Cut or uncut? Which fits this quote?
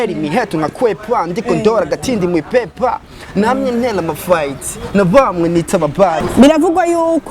cut